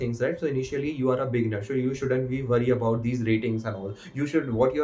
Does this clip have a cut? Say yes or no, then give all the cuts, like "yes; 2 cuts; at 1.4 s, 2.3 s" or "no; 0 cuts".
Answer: no; 0 cuts